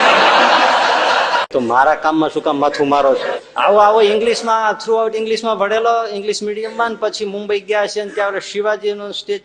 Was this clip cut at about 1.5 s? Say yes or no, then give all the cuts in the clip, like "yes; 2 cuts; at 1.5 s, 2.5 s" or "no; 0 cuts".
yes; 2 cuts; at 1.5 s, 3.3 s